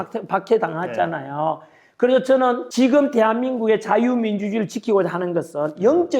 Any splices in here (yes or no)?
yes